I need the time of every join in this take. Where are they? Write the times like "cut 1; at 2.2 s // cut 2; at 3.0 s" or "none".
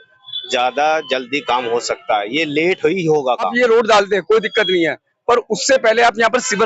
cut 1; at 3.5 s